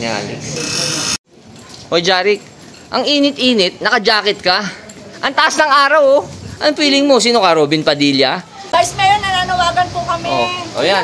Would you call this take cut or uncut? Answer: cut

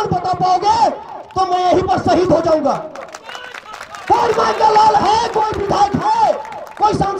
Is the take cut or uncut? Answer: uncut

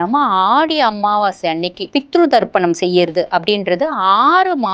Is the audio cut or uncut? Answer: cut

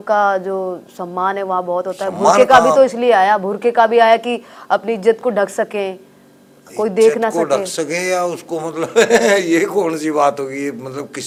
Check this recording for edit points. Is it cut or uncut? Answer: uncut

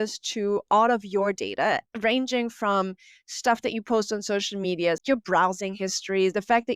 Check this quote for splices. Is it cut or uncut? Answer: cut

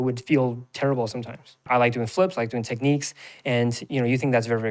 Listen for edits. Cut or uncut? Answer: cut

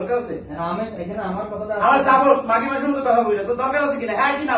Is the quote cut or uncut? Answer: uncut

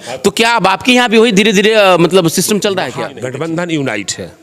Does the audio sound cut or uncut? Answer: cut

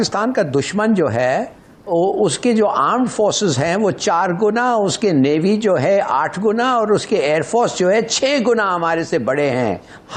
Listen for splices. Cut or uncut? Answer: uncut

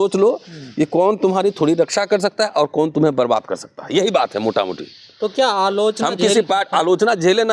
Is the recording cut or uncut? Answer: uncut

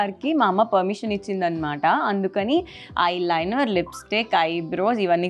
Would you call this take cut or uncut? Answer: uncut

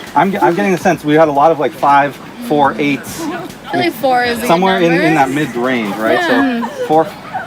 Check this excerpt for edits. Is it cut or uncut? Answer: uncut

